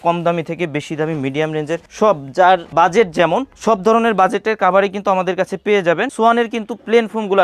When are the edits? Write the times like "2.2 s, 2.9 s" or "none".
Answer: 6.1 s